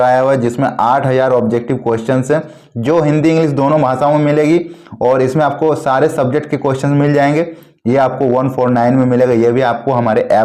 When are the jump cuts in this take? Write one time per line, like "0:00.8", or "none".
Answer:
none